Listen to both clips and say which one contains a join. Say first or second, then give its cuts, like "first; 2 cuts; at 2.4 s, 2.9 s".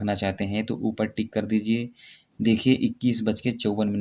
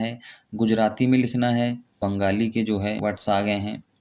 second; 2 cuts; at 1.9 s, 3.0 s